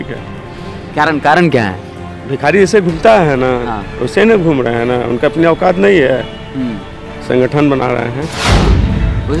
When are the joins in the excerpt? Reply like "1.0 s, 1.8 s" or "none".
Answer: none